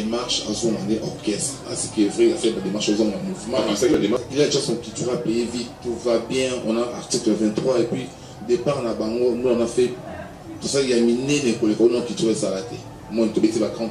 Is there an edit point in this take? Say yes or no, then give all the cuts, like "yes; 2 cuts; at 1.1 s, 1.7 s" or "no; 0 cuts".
yes; 1 cut; at 3.9 s